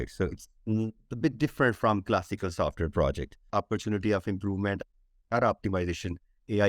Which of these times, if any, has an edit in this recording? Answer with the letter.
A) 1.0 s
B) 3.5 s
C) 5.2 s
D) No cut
B